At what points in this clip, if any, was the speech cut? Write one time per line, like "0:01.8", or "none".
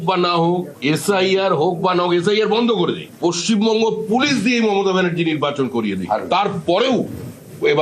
0:03.1